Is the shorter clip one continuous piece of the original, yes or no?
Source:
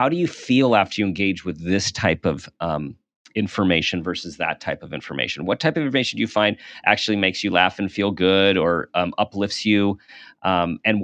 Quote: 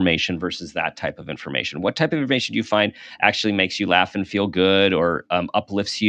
yes